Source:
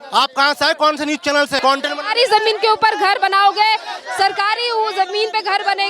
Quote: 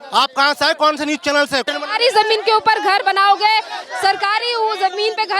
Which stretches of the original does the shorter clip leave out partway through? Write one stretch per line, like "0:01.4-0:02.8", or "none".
0:01.6-0:01.8